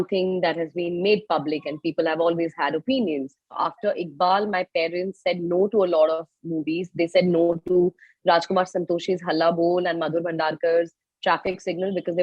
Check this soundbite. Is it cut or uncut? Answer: cut